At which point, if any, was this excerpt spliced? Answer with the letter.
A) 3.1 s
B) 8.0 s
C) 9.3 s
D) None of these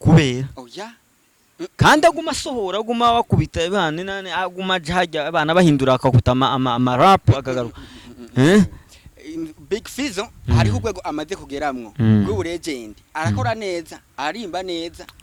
D